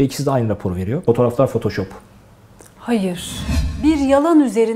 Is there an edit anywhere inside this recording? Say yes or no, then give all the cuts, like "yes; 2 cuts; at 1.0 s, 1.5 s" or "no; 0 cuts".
yes; 2 cuts; at 1.0 s, 3.6 s